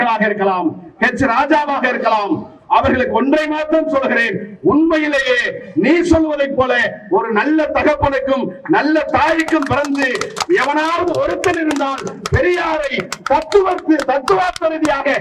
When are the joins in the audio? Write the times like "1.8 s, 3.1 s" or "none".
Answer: none